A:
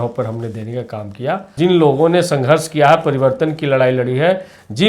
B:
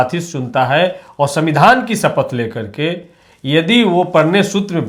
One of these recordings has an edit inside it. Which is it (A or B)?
A